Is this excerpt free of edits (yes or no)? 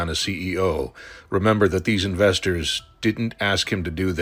yes